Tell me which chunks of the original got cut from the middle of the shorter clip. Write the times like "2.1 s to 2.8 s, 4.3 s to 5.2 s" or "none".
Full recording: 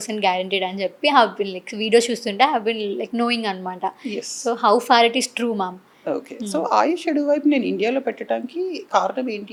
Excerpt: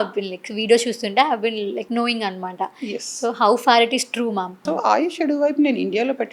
5.8 s to 6.4 s